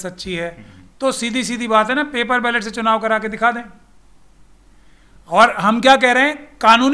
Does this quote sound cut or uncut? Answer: uncut